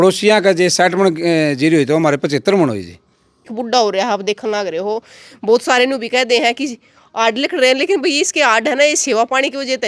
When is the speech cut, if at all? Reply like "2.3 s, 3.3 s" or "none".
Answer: 3.5 s